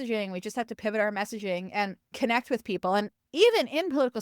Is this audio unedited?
no; 2 cuts; at 2.0 s, 3.2 s

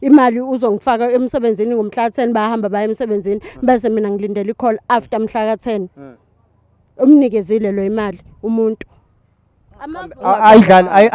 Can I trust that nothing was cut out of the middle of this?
yes; 0 cuts

